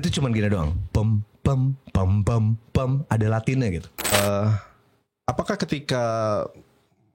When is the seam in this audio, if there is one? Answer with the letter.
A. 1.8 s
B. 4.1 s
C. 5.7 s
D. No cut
B